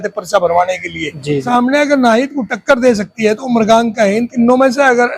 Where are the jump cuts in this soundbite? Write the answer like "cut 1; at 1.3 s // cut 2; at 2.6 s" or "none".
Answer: cut 1; at 1.5 s